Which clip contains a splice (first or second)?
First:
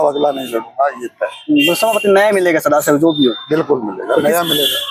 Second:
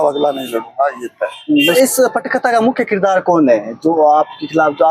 second